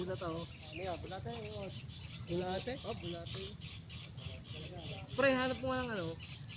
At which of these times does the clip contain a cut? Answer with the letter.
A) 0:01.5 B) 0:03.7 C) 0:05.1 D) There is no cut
D